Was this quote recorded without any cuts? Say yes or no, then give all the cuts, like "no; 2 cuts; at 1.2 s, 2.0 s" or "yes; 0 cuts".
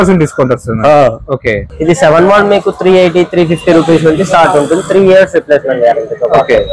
no; 1 cut; at 1.6 s